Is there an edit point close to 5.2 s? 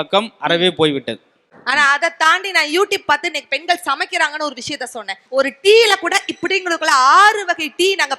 yes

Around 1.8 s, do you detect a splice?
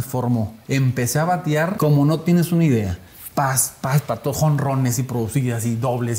yes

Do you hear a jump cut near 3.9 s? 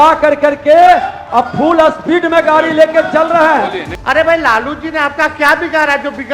yes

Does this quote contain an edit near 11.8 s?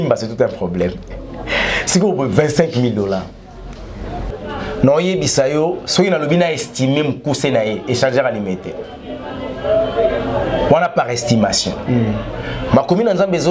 no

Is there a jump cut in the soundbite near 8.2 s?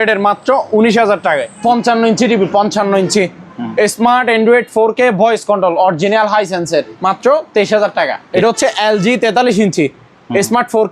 yes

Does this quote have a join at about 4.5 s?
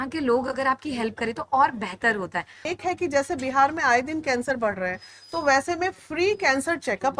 no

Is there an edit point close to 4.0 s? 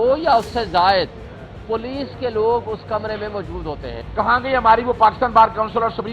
yes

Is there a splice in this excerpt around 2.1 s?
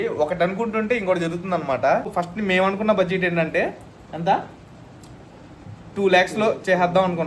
yes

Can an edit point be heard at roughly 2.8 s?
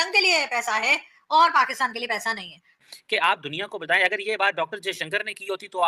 yes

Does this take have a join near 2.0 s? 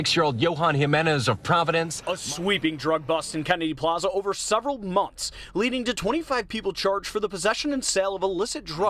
yes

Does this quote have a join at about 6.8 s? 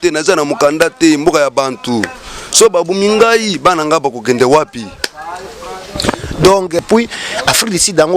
yes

